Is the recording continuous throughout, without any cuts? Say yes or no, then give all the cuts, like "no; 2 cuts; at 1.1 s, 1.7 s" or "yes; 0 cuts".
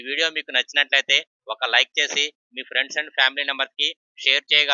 yes; 0 cuts